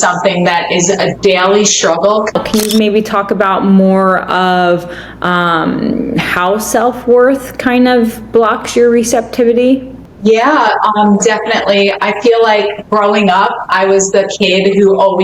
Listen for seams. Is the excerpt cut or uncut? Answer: cut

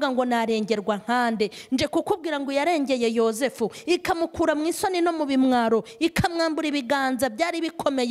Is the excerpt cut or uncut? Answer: uncut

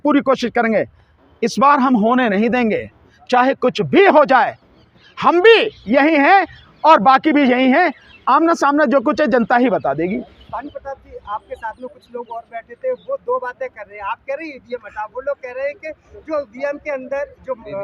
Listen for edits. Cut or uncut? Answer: uncut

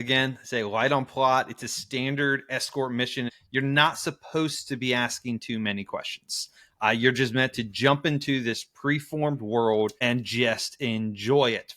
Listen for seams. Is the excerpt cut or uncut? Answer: cut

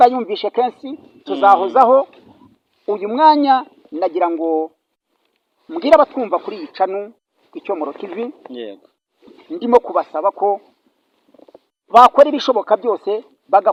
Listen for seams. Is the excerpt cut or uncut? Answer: uncut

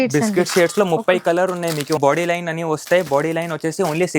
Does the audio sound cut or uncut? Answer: cut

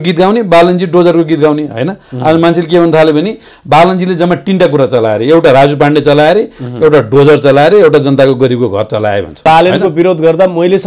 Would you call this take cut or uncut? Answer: cut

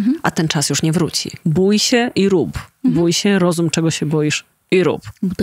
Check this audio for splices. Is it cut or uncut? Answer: cut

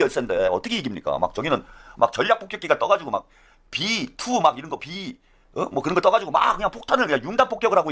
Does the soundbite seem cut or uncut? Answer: uncut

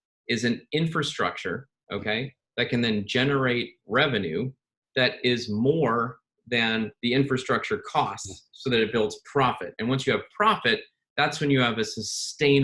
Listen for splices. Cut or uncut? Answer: uncut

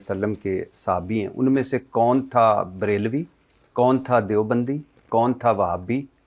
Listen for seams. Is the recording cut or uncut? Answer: uncut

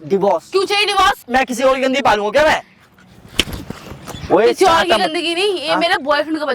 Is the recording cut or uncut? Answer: cut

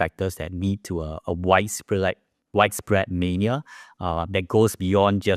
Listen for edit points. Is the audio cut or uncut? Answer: uncut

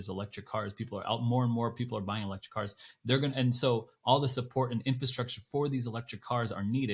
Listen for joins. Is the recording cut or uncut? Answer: uncut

